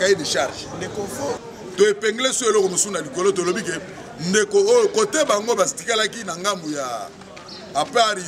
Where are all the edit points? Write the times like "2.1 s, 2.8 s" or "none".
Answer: 1.4 s